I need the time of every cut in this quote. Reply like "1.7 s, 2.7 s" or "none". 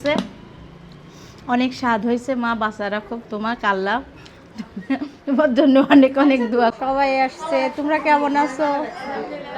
6.8 s